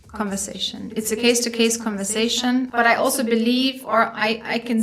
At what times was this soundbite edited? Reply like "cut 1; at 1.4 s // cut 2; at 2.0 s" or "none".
cut 1; at 2.7 s